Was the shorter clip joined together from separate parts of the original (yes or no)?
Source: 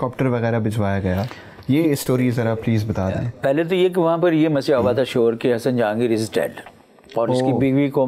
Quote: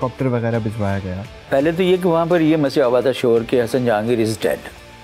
yes